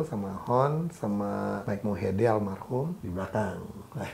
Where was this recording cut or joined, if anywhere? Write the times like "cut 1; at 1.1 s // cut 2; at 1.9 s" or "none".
cut 1; at 1.6 s // cut 2; at 3.0 s